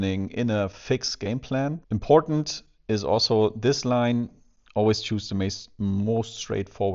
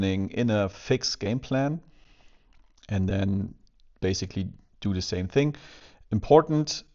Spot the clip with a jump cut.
first; 1 cut; at 1.8 s

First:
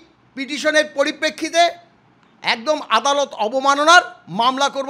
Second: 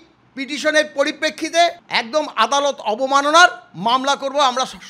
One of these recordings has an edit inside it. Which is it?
second; 1 cut; at 1.9 s

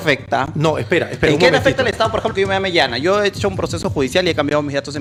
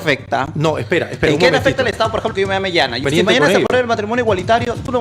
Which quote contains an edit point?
second; 1 cut; at 3.0 s

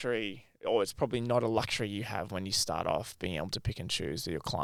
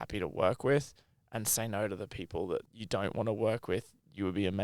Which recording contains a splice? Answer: second; 1 cut; at 2.8 s

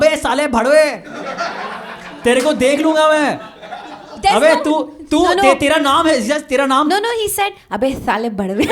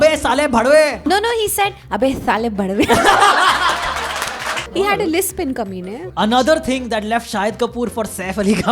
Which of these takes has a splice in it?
second; 3 cuts; at 1.1 s, 4.6 s, 5.7 s

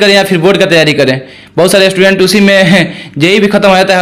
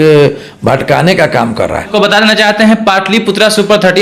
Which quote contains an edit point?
second; 1 cut; at 1.9 s

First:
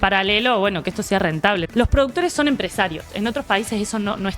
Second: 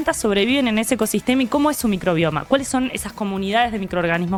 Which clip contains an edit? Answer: first; 2 cuts; at 1.7 s, 3.1 s

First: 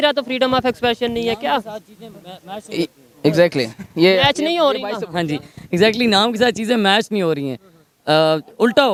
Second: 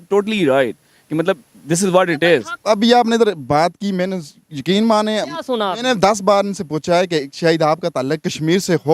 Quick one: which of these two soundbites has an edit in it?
second; 1 cut; at 2.5 s

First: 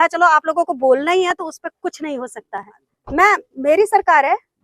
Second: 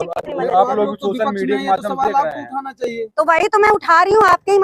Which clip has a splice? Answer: first; 1 cut; at 2.9 s

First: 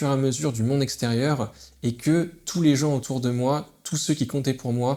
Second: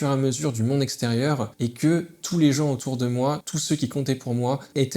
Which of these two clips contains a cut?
second; 2 cuts; at 1.5 s, 3.5 s

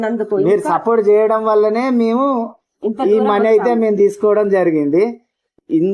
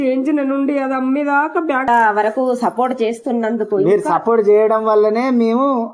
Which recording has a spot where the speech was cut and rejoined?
second; 1 cut; at 1.9 s

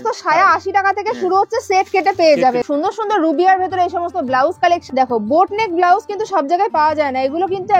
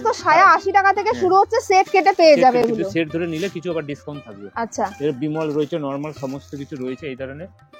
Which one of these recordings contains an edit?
first; 2 cuts; at 2.6 s, 4.8 s

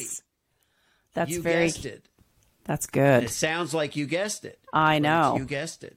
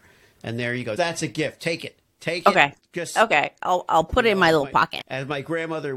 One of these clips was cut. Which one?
second; 1 cut; at 1.0 s

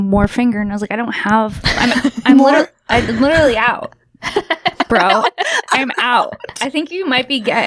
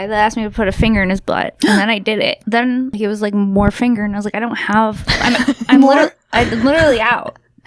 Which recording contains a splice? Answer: second; 1 cut; at 2.5 s

